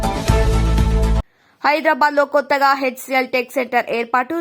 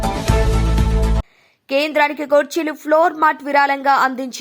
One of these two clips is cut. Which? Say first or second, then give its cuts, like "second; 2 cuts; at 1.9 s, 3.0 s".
second; 1 cut; at 1.4 s